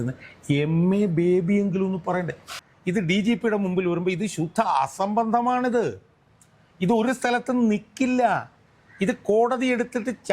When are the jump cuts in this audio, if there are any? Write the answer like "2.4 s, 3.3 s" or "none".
2.5 s